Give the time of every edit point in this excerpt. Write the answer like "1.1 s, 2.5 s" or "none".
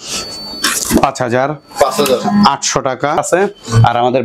3.2 s